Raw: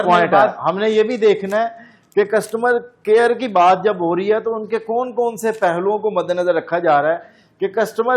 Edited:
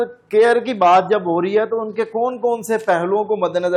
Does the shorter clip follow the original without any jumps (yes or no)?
yes